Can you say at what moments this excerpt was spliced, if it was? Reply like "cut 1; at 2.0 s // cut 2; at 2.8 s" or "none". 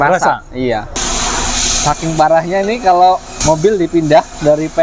cut 1; at 1.0 s // cut 2; at 3.3 s